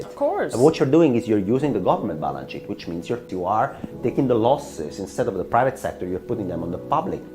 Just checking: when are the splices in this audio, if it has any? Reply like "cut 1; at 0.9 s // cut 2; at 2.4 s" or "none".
cut 1; at 3.3 s